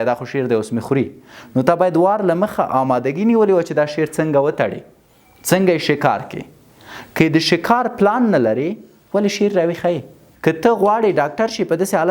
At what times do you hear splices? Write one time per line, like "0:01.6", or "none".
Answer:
0:10.2